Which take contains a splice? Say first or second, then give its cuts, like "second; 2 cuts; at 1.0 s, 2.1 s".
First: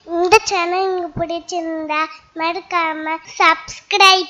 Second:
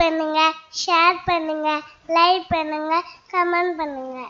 first; 1 cut; at 3.3 s